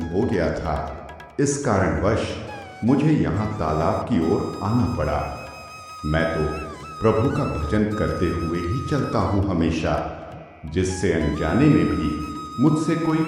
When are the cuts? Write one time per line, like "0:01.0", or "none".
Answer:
none